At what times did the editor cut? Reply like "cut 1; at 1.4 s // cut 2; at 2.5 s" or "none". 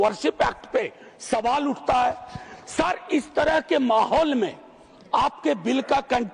none